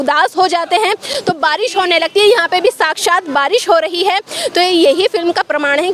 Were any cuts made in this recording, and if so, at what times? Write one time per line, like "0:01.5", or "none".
none